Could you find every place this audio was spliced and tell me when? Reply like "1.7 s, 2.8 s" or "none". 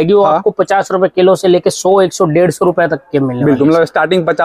none